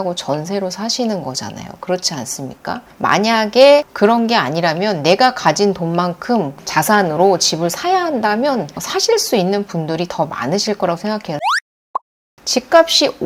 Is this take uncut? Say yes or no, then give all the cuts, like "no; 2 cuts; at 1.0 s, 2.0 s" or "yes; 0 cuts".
no; 3 cuts; at 2.9 s, 6.6 s, 11.8 s